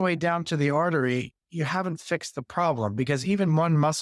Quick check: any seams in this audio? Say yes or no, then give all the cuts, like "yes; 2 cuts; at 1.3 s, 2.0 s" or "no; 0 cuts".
no; 0 cuts